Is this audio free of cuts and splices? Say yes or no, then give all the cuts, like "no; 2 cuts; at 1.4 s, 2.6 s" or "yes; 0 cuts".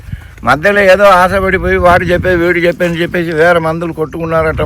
yes; 0 cuts